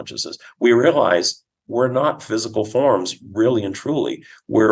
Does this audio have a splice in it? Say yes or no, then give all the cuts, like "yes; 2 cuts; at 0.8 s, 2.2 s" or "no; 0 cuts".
no; 0 cuts